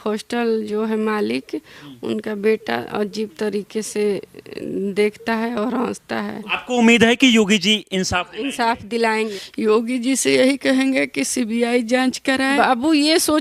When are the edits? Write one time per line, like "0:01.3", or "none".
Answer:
0:06.6
0:09.4
0:12.6